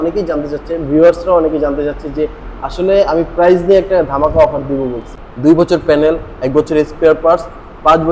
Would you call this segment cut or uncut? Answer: cut